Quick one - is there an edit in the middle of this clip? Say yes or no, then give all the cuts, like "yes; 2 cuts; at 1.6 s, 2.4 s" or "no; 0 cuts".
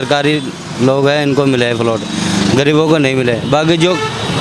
no; 0 cuts